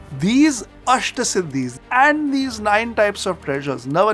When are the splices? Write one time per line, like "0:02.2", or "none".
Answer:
0:01.8